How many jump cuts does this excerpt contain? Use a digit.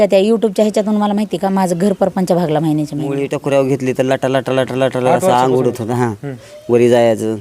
1